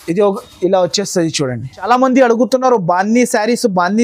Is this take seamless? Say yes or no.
no